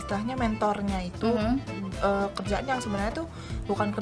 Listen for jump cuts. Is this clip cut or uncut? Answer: uncut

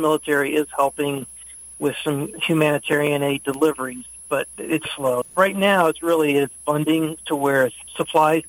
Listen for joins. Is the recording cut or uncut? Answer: cut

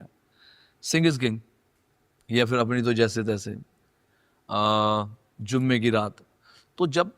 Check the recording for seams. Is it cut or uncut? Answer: uncut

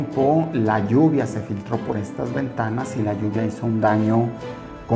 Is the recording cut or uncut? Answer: uncut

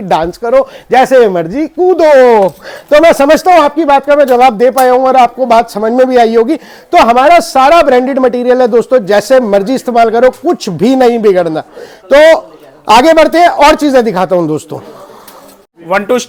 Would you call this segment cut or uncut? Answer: uncut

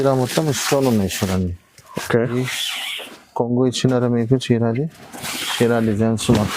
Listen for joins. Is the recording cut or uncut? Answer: cut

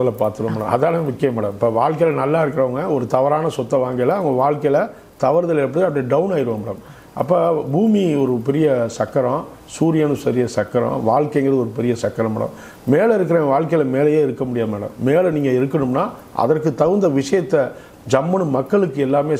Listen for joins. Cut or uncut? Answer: uncut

